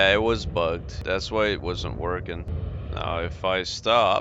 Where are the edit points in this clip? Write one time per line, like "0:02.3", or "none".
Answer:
0:00.9
0:02.6